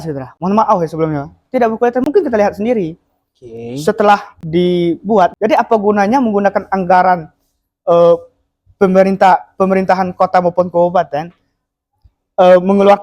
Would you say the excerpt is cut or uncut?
cut